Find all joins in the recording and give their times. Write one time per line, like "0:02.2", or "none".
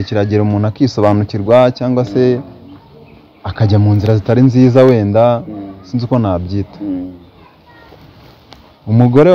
none